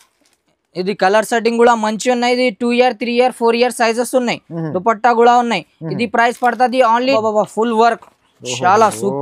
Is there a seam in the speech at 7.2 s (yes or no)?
yes